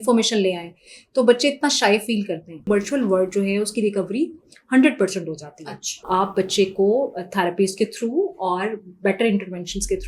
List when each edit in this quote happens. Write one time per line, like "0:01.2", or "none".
0:02.7
0:05.9